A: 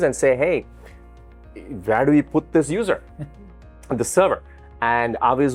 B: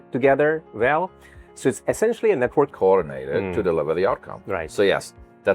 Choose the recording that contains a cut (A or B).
B